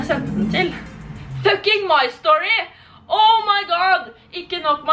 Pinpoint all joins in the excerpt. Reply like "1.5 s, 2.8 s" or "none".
none